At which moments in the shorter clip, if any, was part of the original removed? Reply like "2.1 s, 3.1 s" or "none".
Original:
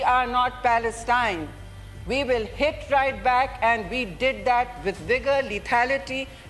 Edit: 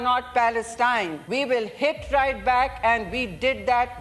1.2 s